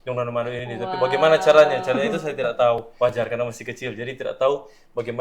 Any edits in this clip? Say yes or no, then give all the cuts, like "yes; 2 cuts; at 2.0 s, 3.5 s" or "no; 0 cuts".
yes; 1 cut; at 2.9 s